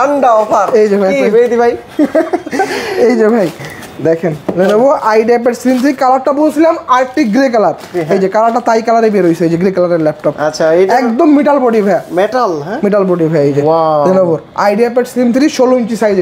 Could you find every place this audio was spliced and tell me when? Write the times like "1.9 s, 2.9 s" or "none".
none